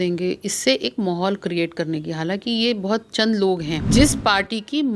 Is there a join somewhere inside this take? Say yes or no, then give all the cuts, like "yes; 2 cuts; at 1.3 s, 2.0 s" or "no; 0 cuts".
yes; 1 cut; at 3.8 s